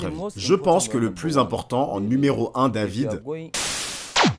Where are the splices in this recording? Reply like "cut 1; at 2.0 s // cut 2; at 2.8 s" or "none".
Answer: cut 1; at 3.4 s